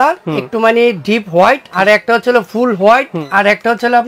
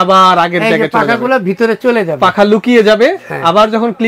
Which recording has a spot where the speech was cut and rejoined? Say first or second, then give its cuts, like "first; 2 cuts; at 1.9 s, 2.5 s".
first; 2 cuts; at 1.7 s, 3.2 s